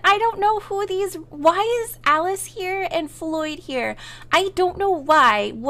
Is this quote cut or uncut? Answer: uncut